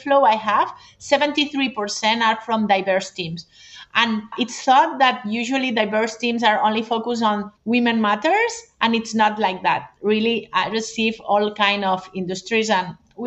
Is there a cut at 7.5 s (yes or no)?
yes